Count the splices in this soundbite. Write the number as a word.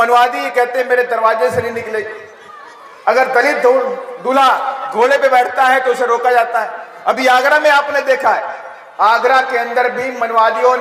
zero